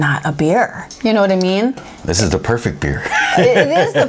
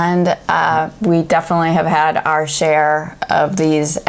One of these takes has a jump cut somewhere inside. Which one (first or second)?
first